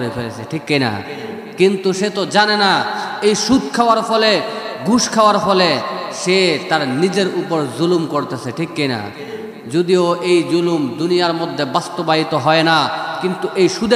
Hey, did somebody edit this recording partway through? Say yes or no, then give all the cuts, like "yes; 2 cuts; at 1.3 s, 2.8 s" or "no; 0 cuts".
no; 0 cuts